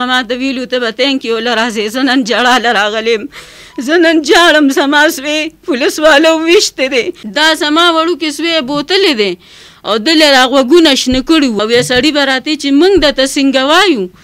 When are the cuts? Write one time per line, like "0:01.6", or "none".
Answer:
0:07.2
0:11.6